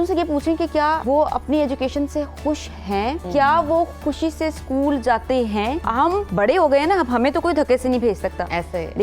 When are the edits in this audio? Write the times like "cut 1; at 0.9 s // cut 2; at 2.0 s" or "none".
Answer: cut 1; at 1.0 s // cut 2; at 3.2 s // cut 3; at 6.0 s